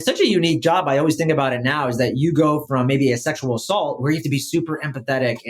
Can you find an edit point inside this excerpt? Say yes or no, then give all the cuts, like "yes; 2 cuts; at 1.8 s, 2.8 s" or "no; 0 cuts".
no; 0 cuts